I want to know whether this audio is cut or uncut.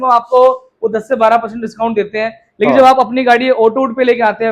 uncut